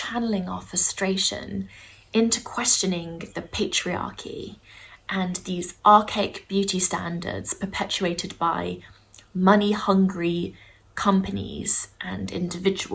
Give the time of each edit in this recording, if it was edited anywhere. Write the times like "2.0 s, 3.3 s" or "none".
none